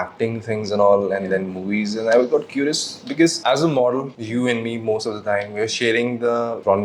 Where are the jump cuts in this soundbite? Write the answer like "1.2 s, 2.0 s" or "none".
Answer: none